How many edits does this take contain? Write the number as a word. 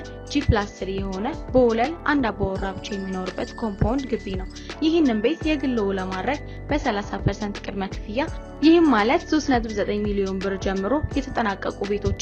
zero